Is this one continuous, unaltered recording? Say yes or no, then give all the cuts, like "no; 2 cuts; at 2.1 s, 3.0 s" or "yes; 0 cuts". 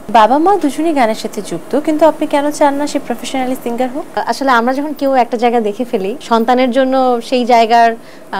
no; 2 cuts; at 4.2 s, 6.1 s